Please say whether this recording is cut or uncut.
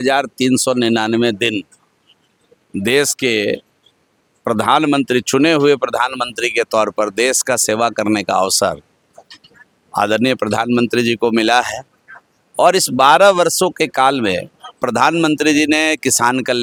uncut